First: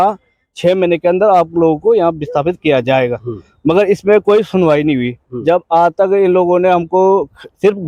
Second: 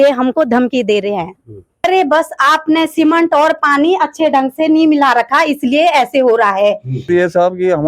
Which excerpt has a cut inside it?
second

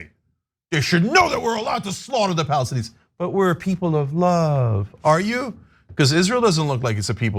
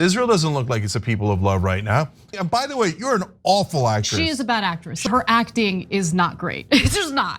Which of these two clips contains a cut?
second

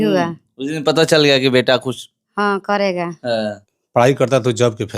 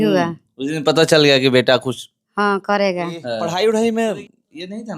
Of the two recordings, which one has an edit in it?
first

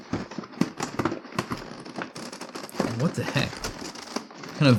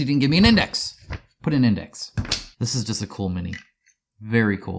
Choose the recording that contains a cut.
second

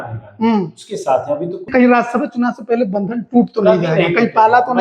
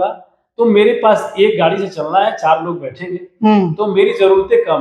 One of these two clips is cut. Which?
first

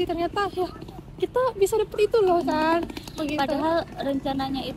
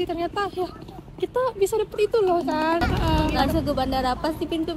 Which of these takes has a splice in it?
second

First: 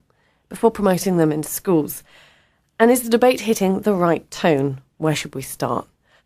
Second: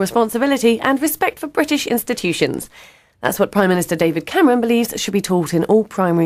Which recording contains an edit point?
first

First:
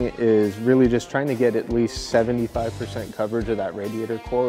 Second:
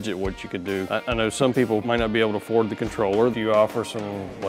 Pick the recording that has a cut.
second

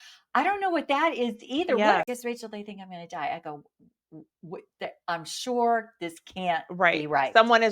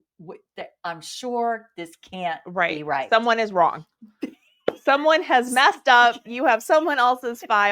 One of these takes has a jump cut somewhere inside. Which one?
first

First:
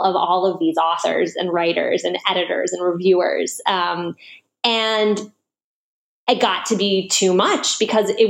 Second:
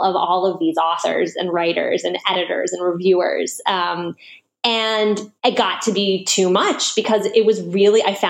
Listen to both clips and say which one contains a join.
second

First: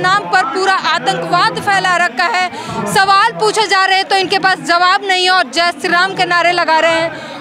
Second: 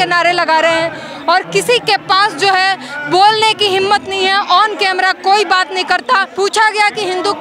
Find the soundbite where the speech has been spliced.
second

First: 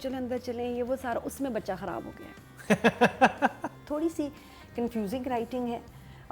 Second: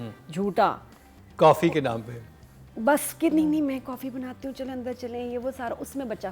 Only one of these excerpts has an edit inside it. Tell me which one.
first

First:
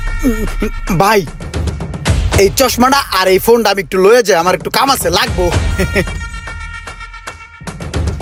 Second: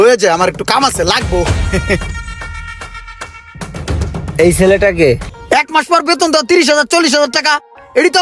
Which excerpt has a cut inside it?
second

